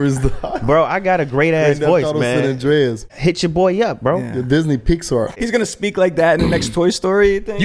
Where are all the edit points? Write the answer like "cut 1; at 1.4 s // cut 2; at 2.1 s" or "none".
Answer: cut 1; at 3.1 s // cut 2; at 5.4 s